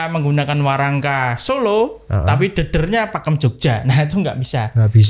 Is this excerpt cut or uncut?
uncut